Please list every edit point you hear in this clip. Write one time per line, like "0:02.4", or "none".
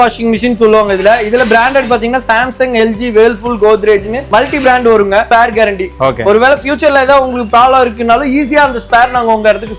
0:05.3